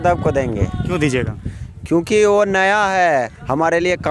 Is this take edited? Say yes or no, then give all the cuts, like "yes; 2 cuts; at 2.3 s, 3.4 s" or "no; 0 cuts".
no; 0 cuts